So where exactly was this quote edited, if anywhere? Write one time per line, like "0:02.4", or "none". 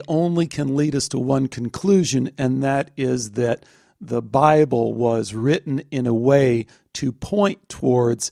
none